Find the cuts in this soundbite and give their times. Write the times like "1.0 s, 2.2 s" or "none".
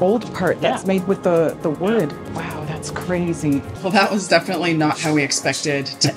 2.2 s, 3.7 s